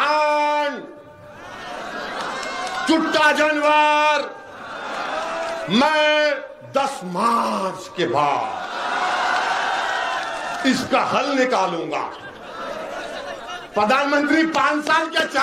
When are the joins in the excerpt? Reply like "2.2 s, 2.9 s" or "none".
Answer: none